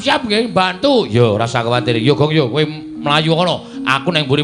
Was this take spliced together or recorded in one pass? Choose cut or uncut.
uncut